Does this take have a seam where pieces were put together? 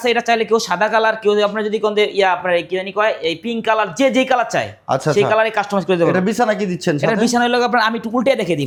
no; 0 cuts

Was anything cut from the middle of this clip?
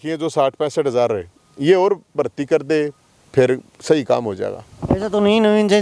no; 0 cuts

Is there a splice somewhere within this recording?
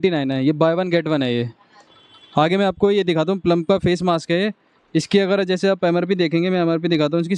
yes; 1 cut; at 2.0 s

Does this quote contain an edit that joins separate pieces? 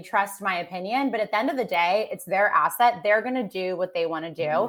no; 0 cuts

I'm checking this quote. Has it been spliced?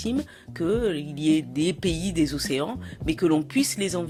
no; 0 cuts

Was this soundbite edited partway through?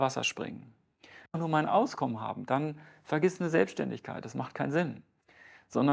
yes; 1 cut; at 1.4 s

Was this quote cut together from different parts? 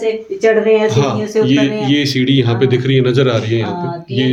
no; 0 cuts

